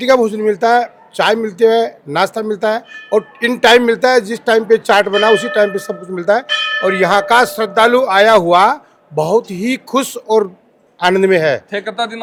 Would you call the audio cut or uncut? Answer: uncut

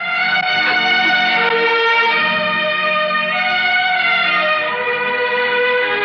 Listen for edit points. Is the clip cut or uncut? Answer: uncut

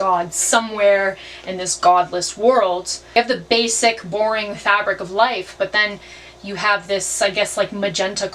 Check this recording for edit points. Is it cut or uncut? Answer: cut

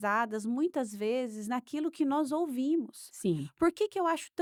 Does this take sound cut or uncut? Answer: uncut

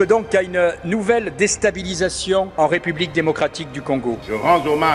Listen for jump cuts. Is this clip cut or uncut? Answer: uncut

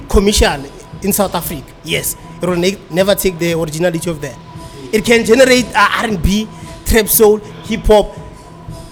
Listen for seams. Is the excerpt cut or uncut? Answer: uncut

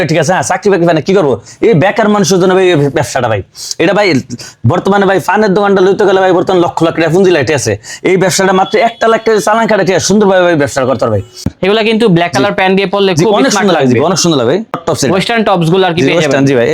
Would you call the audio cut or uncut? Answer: cut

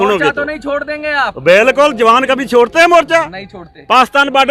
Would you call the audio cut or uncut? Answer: uncut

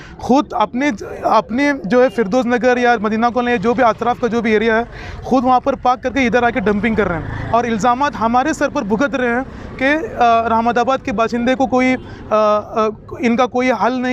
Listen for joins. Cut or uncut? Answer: uncut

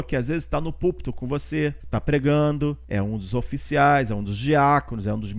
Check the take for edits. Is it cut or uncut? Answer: cut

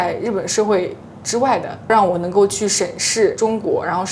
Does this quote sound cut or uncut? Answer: uncut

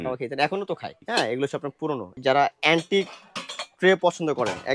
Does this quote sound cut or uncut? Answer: cut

